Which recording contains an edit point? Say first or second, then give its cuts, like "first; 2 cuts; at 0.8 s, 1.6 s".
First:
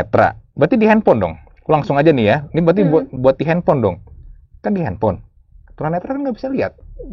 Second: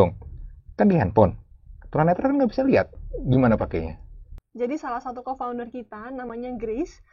second; 1 cut; at 4.4 s